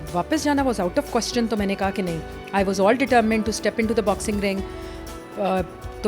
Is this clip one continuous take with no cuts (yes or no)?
yes